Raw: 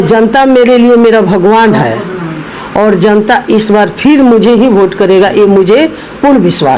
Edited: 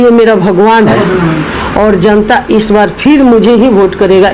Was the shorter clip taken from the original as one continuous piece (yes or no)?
no